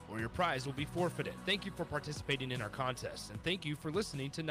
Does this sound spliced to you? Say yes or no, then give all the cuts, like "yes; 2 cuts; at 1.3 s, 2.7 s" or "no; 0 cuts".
no; 0 cuts